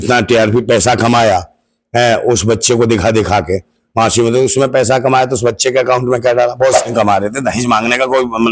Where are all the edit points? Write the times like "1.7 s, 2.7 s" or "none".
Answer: 6.8 s